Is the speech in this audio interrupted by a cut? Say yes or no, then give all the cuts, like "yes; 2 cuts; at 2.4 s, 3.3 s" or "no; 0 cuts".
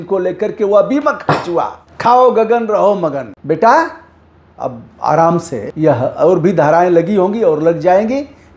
yes; 3 cuts; at 1.8 s, 3.3 s, 5.6 s